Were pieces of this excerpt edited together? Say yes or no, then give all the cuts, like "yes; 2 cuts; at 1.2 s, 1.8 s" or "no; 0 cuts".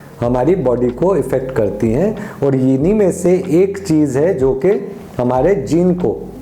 no; 0 cuts